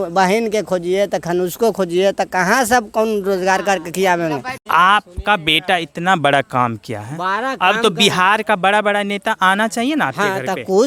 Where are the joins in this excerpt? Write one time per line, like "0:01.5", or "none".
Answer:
0:04.6